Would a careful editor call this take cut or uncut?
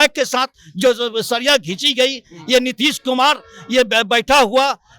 uncut